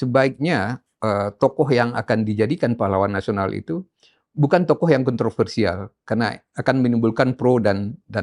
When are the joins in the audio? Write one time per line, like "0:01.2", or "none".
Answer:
none